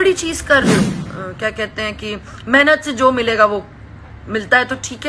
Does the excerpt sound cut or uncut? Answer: cut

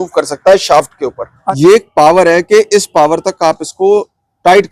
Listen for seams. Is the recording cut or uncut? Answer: cut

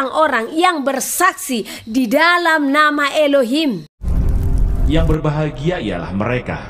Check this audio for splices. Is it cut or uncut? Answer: cut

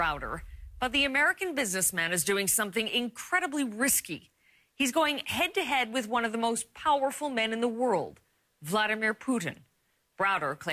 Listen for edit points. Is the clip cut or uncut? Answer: uncut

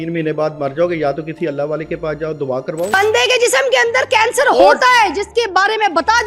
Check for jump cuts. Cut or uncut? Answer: cut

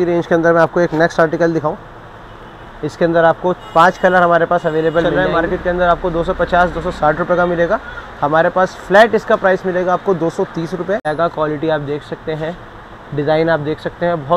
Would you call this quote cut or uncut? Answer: cut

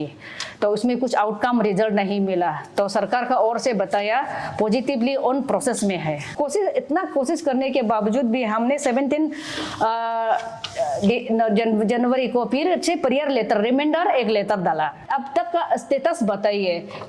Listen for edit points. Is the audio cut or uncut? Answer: cut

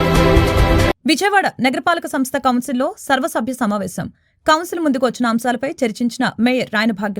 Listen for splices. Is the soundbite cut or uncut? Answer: uncut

